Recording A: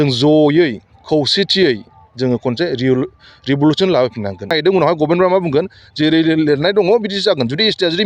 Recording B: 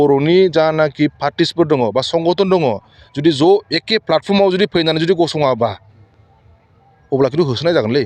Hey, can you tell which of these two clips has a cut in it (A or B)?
A